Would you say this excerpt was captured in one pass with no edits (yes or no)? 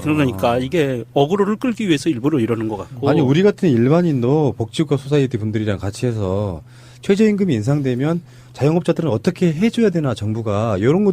no